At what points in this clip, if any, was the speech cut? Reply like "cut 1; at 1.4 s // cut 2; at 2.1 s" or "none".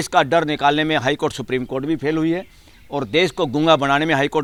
none